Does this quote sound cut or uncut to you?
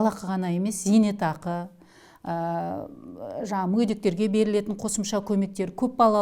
uncut